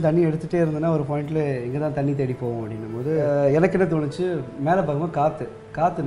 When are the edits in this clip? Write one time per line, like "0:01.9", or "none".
0:03.2